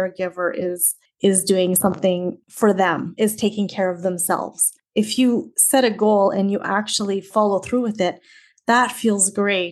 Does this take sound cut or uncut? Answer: cut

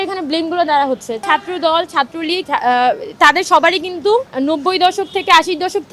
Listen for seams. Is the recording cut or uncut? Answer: cut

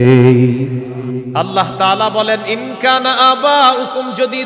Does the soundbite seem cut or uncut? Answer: cut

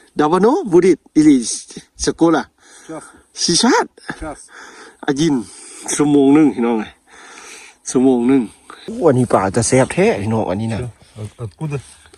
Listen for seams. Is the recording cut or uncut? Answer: cut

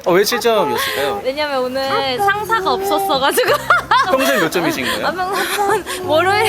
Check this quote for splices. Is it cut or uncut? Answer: cut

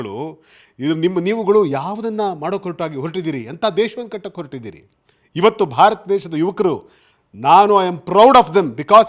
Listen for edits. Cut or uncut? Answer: uncut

